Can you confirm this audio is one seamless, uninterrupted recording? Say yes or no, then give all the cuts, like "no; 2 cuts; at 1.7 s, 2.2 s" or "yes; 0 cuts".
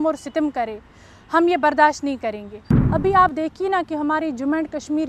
no; 1 cut; at 2.6 s